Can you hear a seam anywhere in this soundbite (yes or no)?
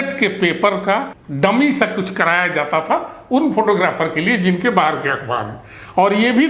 yes